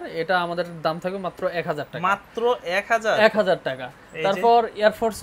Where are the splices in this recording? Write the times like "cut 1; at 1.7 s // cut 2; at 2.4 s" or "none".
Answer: none